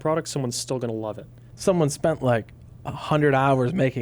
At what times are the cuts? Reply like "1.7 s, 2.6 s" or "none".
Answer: 1.5 s